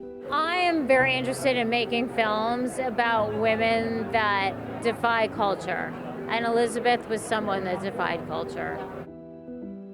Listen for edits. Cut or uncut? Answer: cut